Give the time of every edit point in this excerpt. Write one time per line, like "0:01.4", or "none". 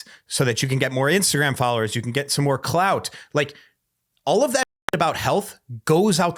none